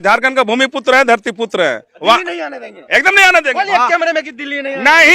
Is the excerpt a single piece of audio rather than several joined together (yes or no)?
no